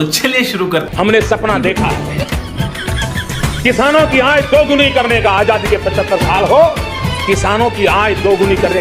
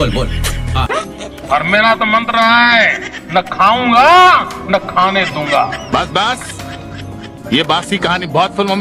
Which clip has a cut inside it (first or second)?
first